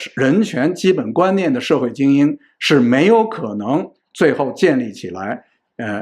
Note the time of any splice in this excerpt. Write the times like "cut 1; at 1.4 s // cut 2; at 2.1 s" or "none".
none